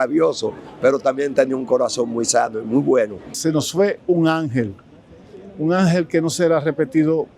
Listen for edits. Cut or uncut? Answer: cut